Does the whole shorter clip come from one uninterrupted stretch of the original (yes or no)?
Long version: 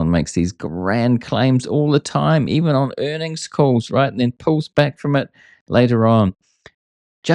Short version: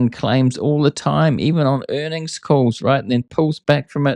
yes